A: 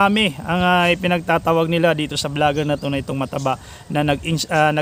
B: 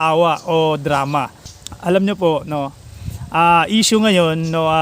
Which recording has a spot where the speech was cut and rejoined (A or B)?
B